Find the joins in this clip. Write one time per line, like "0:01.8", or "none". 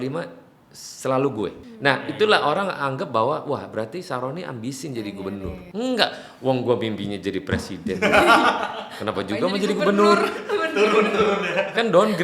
0:01.6
0:05.6